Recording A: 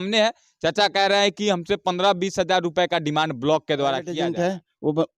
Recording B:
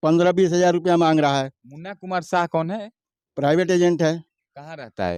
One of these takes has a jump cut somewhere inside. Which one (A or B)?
A